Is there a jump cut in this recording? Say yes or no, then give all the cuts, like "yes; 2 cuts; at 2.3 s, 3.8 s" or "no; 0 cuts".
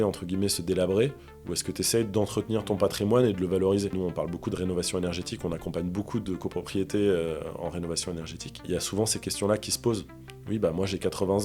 yes; 2 cuts; at 3.9 s, 8.7 s